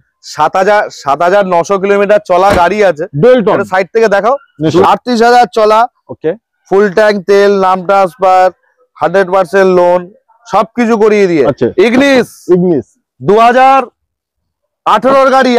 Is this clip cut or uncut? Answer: cut